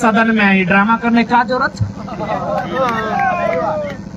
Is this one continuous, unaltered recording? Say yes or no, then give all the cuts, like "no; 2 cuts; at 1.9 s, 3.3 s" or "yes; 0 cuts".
yes; 0 cuts